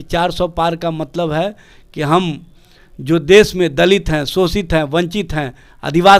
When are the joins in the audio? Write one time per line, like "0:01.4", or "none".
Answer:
none